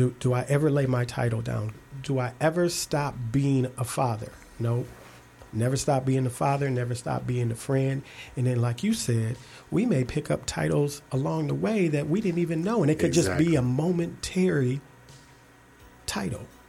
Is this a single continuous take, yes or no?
no